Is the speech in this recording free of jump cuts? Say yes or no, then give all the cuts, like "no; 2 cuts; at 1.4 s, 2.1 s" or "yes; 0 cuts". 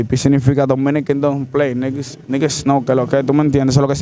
yes; 0 cuts